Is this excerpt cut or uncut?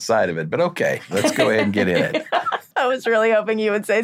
cut